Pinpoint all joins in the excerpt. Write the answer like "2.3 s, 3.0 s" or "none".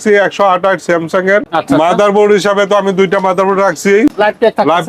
1.5 s, 4.1 s